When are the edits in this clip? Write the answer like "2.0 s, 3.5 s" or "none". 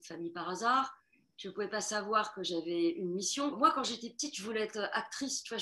none